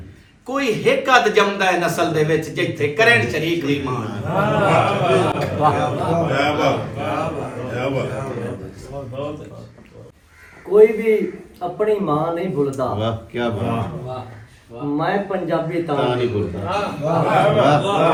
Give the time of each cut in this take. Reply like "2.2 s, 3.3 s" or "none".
none